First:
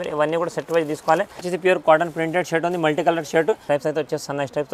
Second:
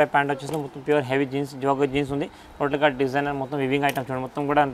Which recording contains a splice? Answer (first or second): first